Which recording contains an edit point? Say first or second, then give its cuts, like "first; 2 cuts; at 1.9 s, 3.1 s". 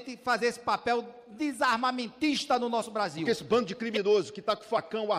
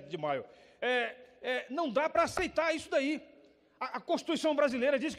first; 1 cut; at 3.2 s